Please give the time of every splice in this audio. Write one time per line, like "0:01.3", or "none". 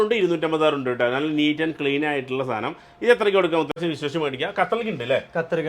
0:03.7